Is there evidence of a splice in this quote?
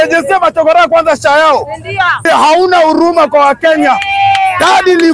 yes; 1 cut; at 2.2 s

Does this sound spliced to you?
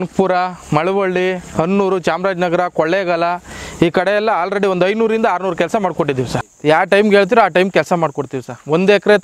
yes; 1 cut; at 6.5 s

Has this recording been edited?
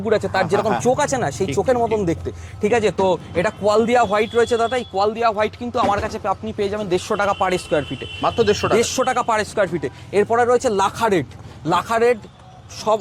no; 0 cuts

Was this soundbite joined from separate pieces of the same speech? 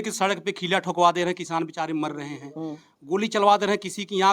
no; 0 cuts

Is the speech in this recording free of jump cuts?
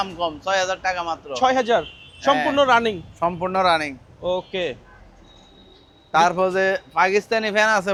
yes; 0 cuts

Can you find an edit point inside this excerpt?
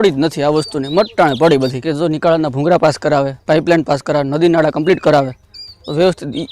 yes; 1 cut; at 1.8 s

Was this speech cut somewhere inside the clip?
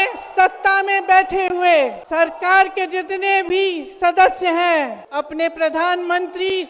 yes; 2 cuts; at 2.0 s, 5.0 s

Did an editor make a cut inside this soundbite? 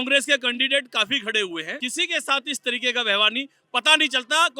yes; 1 cut; at 1.7 s

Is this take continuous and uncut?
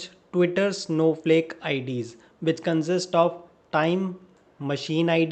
yes; 0 cuts

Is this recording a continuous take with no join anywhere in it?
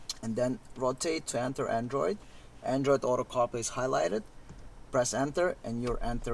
yes; 0 cuts

